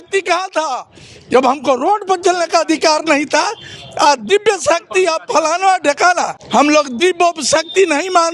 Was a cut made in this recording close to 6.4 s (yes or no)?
yes